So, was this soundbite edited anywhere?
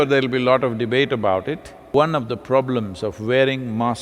yes; 1 cut; at 1.7 s

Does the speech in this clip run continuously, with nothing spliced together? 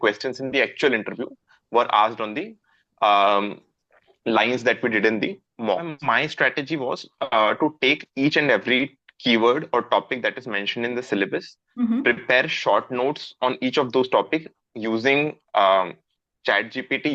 no; 1 cut; at 5.9 s

